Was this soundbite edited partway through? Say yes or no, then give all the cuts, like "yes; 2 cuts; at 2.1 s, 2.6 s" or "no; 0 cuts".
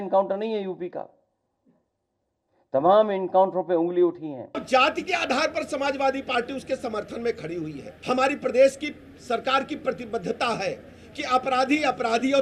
yes; 2 cuts; at 4.6 s, 7.9 s